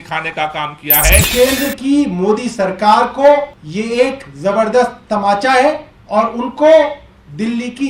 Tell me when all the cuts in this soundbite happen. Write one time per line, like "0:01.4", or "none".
0:01.3
0:03.6
0:05.9